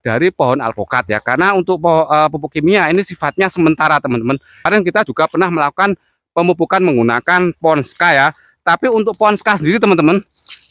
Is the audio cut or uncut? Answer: cut